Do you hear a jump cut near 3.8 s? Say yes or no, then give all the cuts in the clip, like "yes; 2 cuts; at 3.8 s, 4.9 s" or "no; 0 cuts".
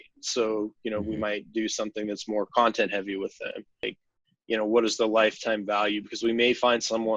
yes; 1 cut; at 3.8 s